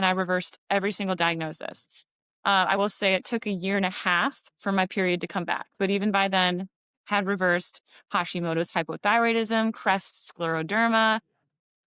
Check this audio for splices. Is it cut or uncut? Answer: uncut